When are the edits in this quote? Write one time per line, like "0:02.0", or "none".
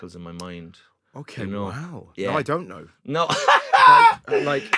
none